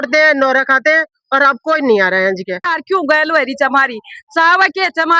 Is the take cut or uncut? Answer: cut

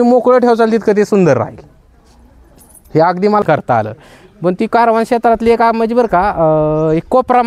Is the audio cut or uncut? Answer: cut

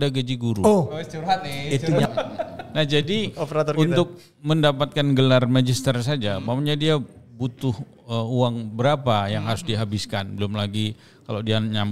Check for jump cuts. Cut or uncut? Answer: uncut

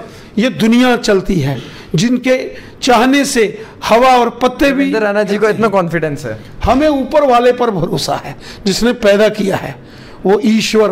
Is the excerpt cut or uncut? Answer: uncut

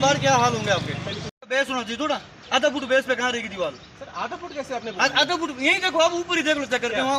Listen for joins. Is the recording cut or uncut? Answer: cut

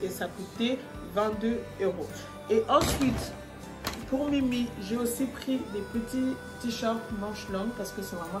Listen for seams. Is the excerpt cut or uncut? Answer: uncut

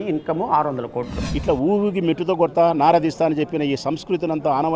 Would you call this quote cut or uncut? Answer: cut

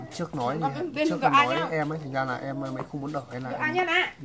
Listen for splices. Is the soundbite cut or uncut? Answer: uncut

